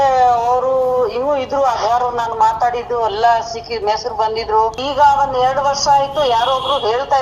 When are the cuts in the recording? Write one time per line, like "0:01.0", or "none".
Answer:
0:04.8

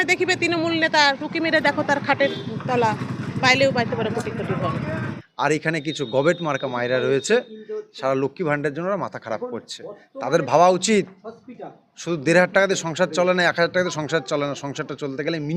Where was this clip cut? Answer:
0:04.9

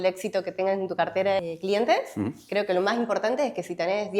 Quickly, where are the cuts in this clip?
0:01.4

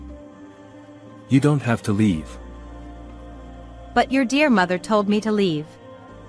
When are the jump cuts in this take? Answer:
none

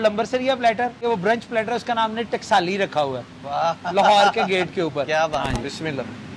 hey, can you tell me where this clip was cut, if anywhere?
0:01.0
0:05.5

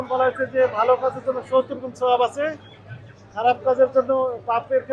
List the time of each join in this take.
none

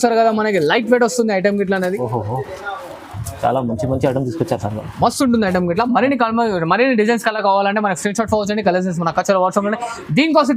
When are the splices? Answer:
none

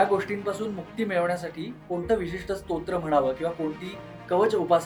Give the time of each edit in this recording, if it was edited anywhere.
none

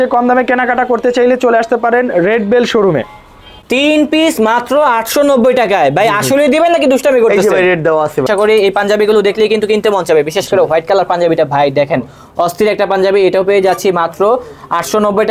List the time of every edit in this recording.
0:03.5
0:08.3

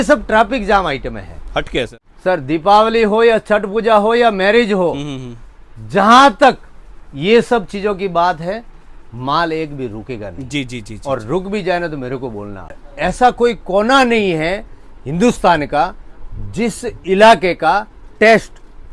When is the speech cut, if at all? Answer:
0:02.0
0:12.8

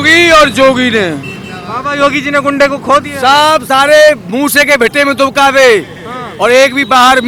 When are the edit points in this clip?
none

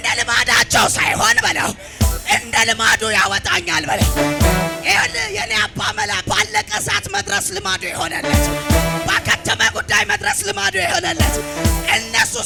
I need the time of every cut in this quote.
none

